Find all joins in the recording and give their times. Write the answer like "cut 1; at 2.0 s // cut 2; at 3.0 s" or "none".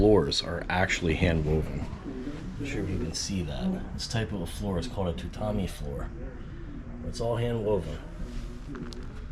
none